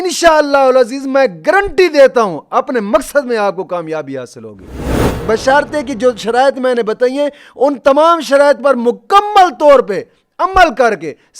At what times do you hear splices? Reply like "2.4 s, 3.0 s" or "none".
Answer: 4.9 s